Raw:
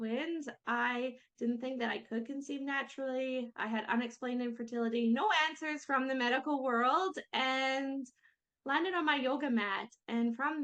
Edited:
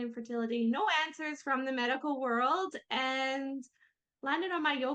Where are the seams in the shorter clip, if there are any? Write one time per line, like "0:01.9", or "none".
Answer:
none